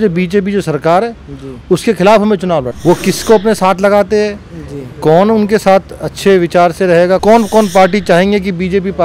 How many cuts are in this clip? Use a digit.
2